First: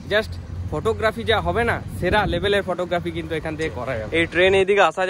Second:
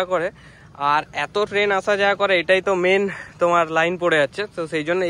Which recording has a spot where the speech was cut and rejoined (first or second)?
first